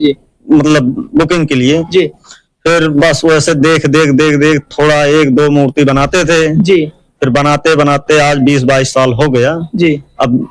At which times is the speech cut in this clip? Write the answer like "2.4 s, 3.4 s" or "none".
none